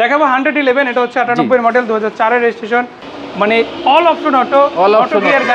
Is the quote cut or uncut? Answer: cut